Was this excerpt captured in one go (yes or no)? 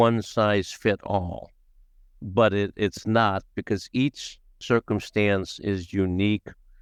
yes